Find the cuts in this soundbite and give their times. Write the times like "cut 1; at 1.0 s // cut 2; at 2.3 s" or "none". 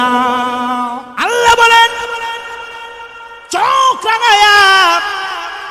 cut 1; at 1.0 s